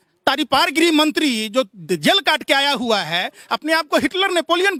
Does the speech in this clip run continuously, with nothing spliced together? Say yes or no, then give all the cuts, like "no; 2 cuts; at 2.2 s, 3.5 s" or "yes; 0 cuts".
yes; 0 cuts